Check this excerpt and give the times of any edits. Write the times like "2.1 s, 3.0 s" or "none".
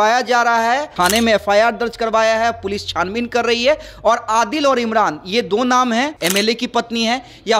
0.9 s, 6.1 s